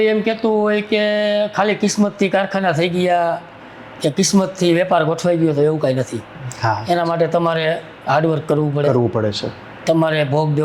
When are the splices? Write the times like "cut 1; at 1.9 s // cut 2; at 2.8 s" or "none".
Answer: none

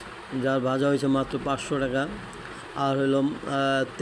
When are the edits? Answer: none

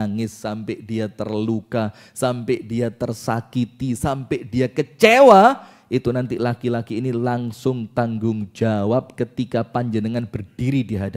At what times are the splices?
none

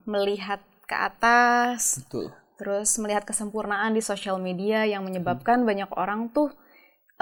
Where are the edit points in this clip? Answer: none

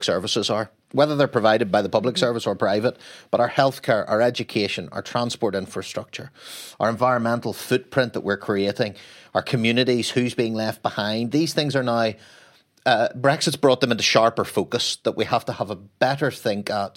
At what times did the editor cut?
none

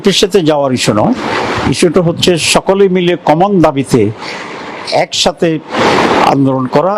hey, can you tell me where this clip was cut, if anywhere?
none

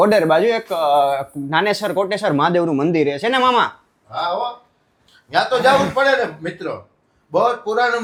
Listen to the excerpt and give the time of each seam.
none

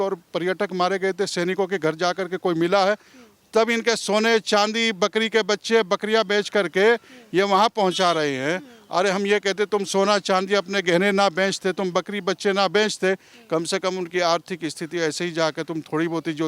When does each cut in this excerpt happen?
none

